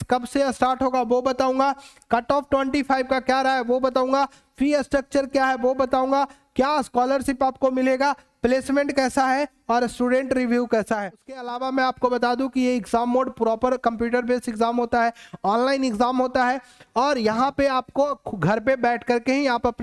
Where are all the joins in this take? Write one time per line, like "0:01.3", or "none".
0:11.4

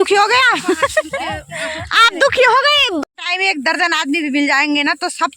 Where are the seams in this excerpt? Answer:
0:03.0

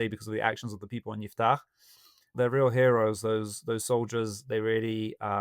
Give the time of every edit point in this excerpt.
0:02.3

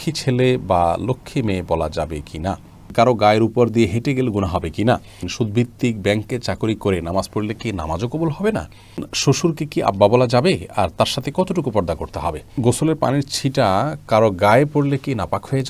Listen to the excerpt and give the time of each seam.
0:02.9
0:05.2
0:09.1
0:12.5

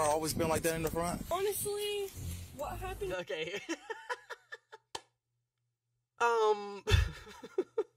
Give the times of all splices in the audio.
0:01.3
0:06.1

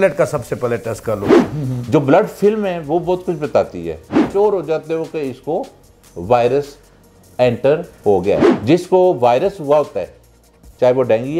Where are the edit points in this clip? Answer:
0:01.4
0:04.3
0:08.5

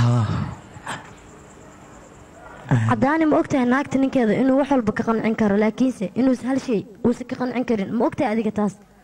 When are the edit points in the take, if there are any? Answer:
0:00.9

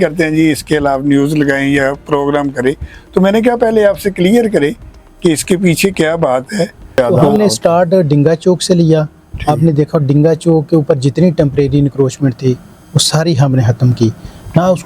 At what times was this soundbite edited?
0:07.0

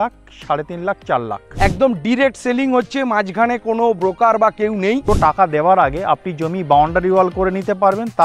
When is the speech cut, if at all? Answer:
0:01.4
0:05.0

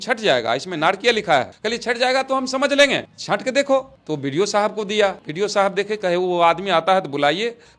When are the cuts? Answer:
0:05.2

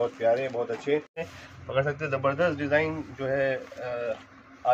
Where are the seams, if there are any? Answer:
0:01.4

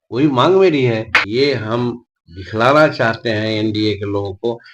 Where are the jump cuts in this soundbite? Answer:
0:01.2

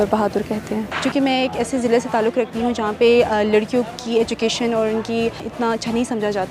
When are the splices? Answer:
0:00.9
0:05.4

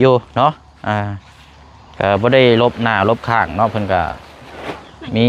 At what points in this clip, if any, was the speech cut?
none

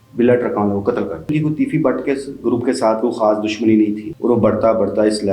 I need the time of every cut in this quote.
0:01.3
0:04.1

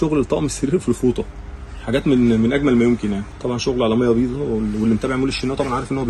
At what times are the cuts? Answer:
0:03.3

